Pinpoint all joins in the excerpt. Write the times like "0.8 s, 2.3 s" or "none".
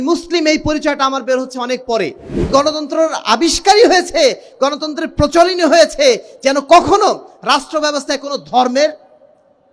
2.5 s